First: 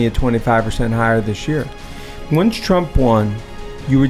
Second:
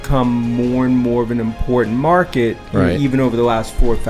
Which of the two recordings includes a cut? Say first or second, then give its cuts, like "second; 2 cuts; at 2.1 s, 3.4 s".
first; 1 cut; at 2.1 s